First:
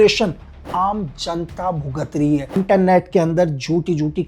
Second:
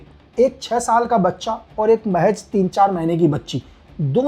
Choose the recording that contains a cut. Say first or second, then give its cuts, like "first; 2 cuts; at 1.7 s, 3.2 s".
first; 1 cut; at 2.6 s